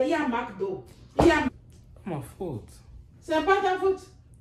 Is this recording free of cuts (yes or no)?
no